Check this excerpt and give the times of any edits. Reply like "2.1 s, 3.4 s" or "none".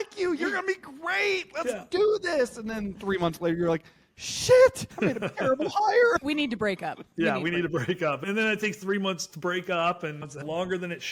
4.9 s, 6.2 s, 8.2 s, 10.4 s